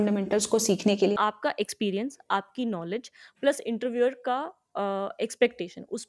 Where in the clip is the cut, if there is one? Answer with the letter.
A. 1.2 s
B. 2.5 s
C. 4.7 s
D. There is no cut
A